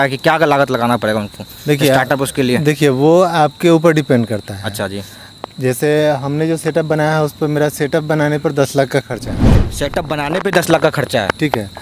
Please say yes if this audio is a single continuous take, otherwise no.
yes